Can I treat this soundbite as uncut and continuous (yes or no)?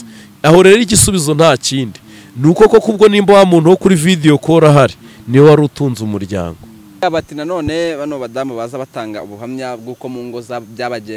no